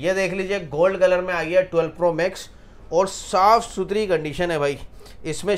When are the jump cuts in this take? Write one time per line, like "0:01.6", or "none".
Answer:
none